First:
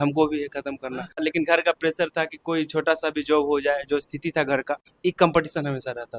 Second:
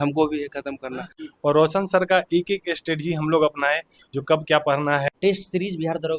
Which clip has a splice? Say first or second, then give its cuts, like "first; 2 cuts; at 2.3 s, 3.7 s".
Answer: second; 2 cuts; at 1.1 s, 5.1 s